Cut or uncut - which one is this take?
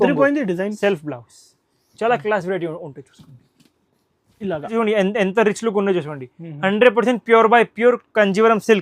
cut